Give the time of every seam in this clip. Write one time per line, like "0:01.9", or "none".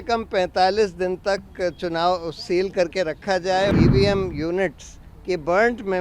0:03.7